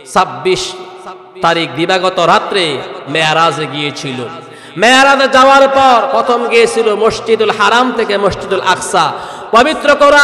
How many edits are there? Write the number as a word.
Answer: one